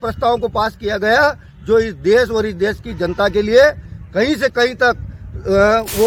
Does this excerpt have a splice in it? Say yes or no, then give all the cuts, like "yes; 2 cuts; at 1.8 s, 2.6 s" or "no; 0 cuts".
no; 0 cuts